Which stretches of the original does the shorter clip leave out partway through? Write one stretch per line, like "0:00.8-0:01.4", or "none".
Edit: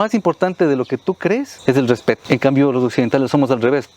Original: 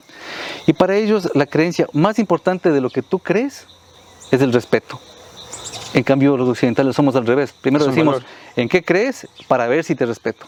0:03.6-0:04.2
0:04.9-0:05.9